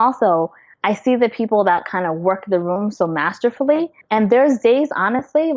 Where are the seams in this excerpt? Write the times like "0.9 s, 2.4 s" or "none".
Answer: 4.3 s